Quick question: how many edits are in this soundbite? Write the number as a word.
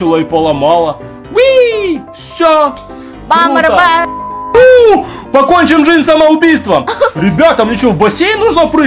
one